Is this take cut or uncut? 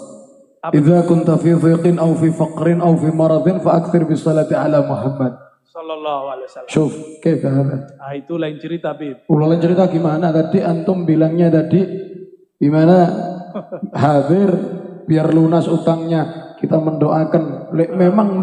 uncut